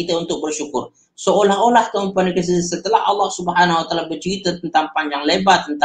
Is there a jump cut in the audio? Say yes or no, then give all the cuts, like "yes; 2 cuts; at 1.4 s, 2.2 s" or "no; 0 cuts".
no; 0 cuts